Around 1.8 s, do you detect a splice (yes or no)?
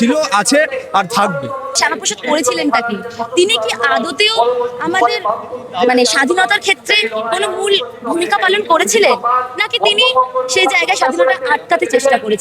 yes